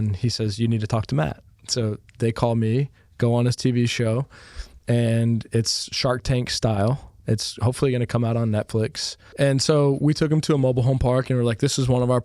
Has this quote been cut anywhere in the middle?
yes; 2 cuts; at 7.1 s, 9.2 s

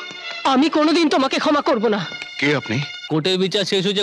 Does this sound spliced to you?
yes; 1 cut; at 2.9 s

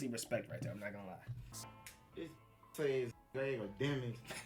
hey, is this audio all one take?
no; 1 cut; at 1.6 s

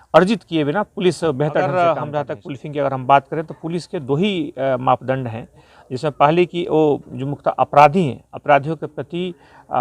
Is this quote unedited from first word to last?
no; 1 cut; at 1.7 s

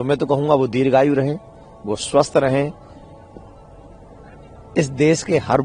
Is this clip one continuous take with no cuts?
yes; 0 cuts

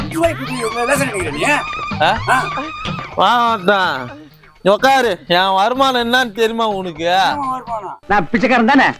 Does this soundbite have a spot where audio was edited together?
no; 0 cuts

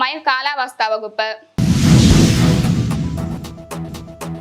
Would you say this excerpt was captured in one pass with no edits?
no; 1 cut; at 1.5 s

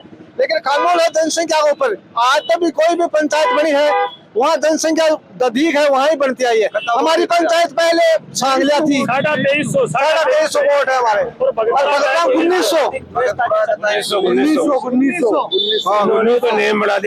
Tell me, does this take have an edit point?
no; 0 cuts

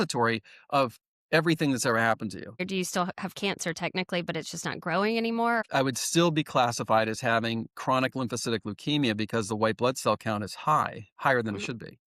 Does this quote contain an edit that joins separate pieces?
yes; 2 cuts; at 2.6 s, 5.6 s

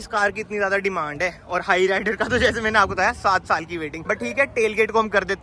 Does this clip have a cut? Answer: no; 0 cuts

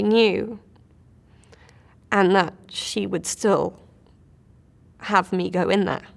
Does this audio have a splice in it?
no; 0 cuts

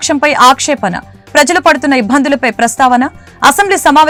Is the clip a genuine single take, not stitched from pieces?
yes; 0 cuts

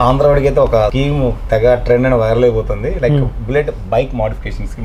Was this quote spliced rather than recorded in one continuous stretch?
no; 0 cuts

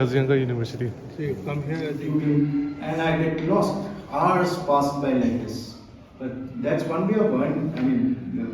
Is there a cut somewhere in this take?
yes; 1 cut; at 2.0 s

